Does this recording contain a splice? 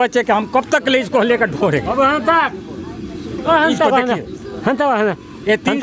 no; 0 cuts

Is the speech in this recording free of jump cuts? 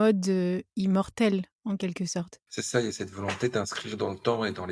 no; 1 cut; at 2.5 s

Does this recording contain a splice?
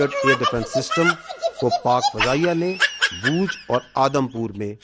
no; 0 cuts

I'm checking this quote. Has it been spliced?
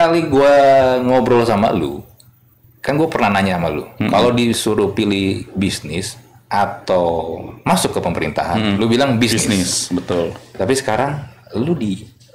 no; 0 cuts

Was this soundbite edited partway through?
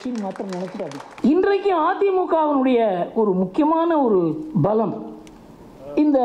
yes; 1 cut; at 1.1 s

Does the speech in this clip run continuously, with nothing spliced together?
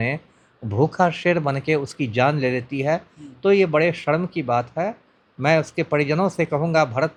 yes; 0 cuts

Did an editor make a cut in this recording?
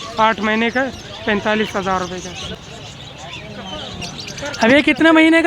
yes; 1 cut; at 2.5 s

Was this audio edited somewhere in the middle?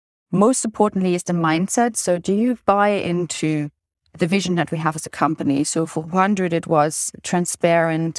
no; 0 cuts

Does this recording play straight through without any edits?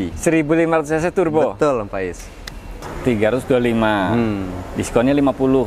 no; 1 cut; at 2.8 s

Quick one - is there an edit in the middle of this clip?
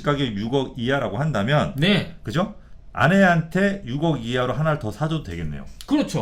no; 0 cuts

